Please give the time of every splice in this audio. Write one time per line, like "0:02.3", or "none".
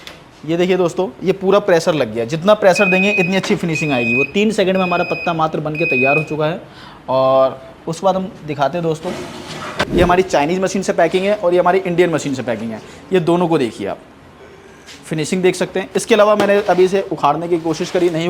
0:09.8